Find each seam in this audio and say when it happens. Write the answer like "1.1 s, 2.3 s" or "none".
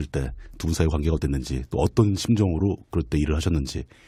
none

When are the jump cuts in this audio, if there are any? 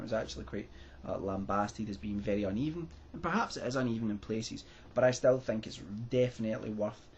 5.1 s

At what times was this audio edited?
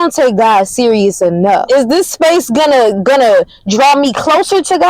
1.6 s

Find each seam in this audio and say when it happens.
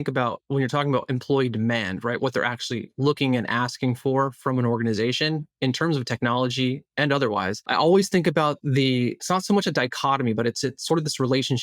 7.6 s, 9.2 s

